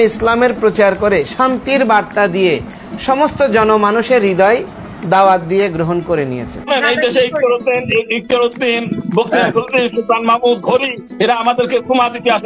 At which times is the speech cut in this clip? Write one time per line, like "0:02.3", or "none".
0:06.7